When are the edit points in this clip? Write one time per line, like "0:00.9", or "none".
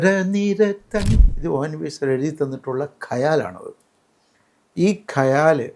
0:01.3